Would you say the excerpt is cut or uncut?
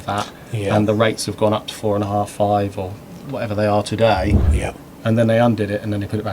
cut